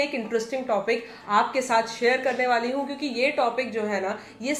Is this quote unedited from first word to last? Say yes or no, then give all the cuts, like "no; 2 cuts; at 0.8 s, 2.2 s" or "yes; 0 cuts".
yes; 0 cuts